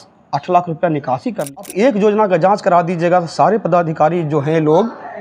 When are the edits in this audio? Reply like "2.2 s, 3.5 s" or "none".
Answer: 1.6 s